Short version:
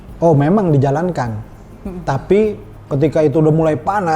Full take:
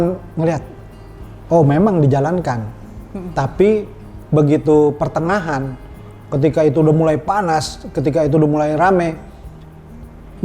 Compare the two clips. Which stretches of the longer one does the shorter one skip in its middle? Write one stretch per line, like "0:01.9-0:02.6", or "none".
0:04.0-0:06.1